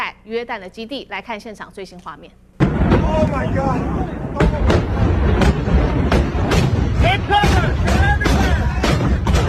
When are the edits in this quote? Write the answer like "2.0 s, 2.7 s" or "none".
none